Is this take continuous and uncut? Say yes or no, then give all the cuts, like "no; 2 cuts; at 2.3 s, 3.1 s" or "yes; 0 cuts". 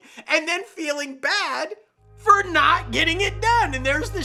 yes; 0 cuts